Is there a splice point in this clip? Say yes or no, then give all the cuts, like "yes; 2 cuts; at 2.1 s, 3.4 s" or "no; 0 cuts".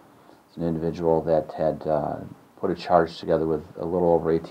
no; 0 cuts